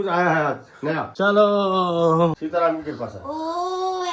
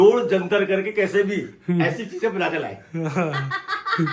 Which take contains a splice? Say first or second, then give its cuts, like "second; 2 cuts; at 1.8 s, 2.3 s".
first; 2 cuts; at 1.1 s, 2.4 s